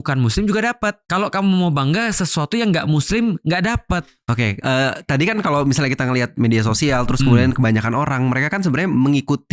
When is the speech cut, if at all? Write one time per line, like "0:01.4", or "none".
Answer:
0:01.0
0:04.0